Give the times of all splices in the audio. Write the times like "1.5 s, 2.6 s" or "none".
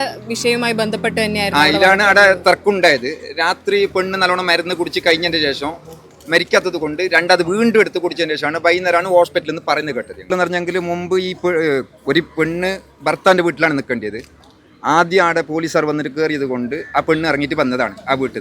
10.3 s

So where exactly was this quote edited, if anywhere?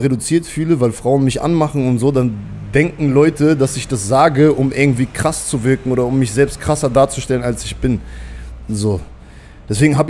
none

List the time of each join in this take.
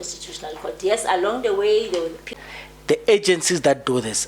2.4 s

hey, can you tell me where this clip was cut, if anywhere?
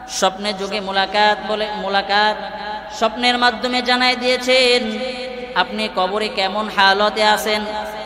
2.8 s

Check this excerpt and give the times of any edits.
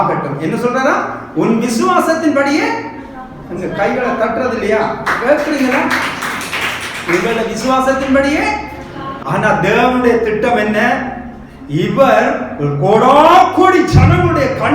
9.1 s

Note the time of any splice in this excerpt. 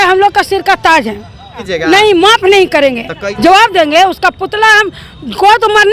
1.7 s, 3.2 s

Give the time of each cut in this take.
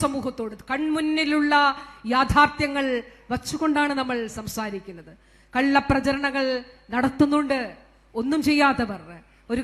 none

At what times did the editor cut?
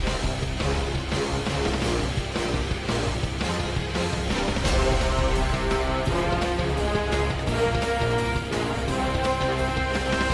none

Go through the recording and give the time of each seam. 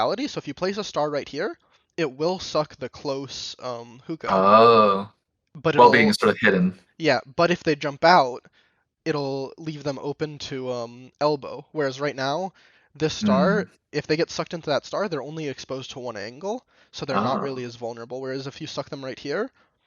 16.3 s

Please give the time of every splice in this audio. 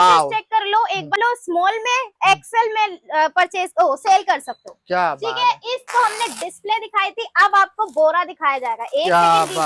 1.1 s, 5.9 s

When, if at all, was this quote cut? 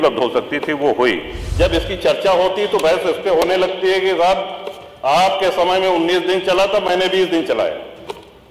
1.4 s

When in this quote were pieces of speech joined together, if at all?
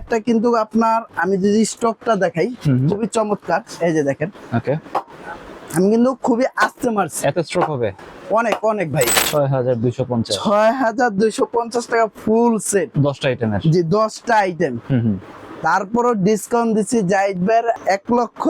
9.2 s

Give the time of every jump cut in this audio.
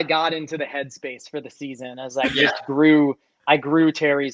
none

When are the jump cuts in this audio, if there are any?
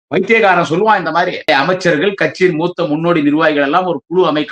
1.5 s

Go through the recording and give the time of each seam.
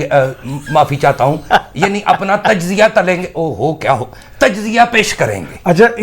none

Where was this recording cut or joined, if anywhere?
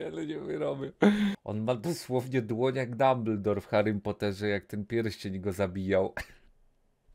1.4 s

